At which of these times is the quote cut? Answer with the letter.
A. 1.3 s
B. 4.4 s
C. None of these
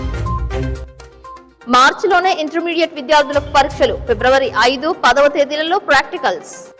C